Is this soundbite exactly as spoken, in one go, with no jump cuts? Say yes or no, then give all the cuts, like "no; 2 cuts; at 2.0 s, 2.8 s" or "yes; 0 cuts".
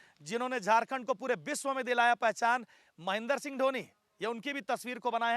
yes; 0 cuts